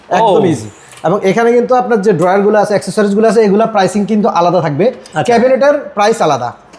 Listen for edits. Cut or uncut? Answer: uncut